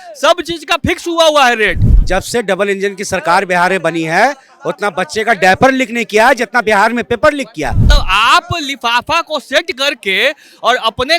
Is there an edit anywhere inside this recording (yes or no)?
yes